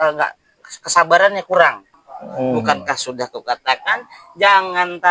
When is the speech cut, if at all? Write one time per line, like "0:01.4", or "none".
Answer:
0:01.8